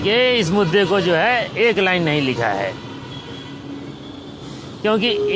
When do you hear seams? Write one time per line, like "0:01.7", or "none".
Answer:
none